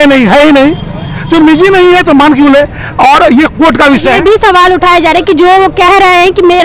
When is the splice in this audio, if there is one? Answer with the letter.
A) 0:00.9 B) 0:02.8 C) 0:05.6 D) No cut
D